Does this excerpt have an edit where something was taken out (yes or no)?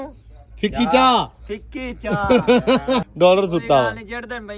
yes